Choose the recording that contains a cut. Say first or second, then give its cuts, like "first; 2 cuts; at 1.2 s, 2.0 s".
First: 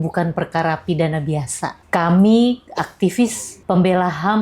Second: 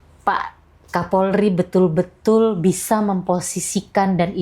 first; 2 cuts; at 1.8 s, 3.5 s